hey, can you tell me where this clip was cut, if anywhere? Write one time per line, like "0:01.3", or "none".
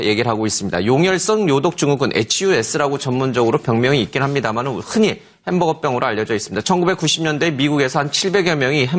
none